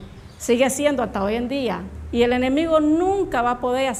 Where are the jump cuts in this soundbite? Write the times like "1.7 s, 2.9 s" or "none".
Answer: none